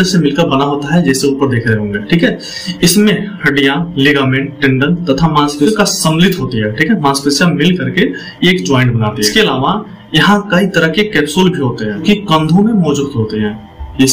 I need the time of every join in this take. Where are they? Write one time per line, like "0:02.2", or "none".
0:05.7
0:09.3
0:12.0